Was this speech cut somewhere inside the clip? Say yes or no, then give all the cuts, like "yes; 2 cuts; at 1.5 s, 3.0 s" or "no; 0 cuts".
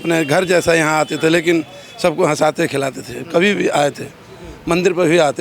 no; 0 cuts